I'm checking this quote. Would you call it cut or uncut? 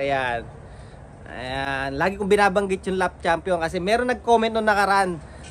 uncut